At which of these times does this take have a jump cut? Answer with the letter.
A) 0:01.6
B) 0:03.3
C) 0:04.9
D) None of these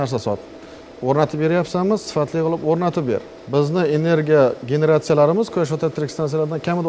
B